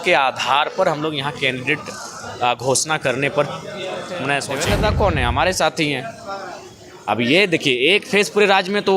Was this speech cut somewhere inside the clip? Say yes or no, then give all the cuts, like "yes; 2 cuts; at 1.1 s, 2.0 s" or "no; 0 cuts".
yes; 1 cut; at 4.5 s